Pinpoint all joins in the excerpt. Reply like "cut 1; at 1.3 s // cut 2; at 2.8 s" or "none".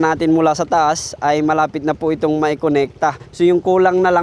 cut 1; at 3.2 s